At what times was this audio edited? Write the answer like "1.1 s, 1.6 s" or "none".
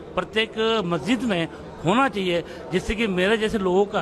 none